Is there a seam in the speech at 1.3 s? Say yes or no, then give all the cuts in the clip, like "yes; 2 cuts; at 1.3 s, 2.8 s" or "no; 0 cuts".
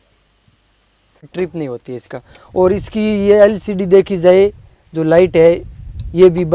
yes; 1 cut; at 1.3 s